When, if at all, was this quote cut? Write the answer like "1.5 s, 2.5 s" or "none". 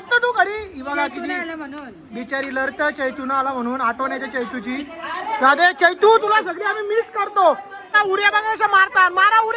7.8 s